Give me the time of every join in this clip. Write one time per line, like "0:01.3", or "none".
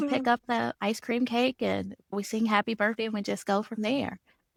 none